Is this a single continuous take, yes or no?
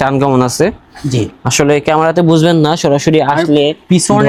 yes